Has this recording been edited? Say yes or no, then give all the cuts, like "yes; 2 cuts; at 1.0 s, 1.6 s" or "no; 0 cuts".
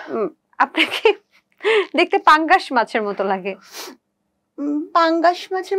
no; 0 cuts